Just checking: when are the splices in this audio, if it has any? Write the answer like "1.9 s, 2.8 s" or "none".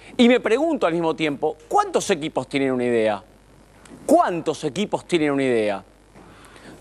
none